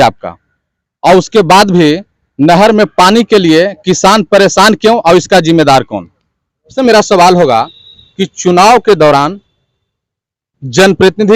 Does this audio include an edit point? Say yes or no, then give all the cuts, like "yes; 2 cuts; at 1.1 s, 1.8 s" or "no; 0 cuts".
yes; 1 cut; at 6.7 s